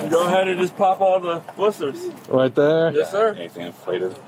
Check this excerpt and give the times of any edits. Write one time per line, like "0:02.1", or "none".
none